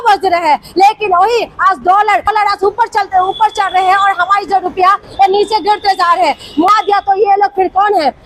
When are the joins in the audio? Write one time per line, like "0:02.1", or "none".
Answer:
none